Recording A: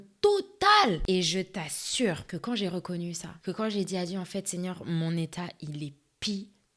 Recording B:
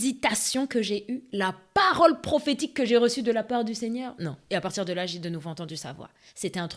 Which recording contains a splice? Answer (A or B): A